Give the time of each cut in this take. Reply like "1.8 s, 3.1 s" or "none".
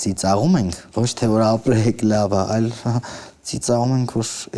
none